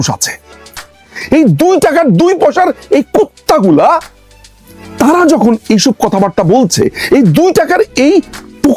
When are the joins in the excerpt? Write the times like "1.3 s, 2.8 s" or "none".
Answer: 1.0 s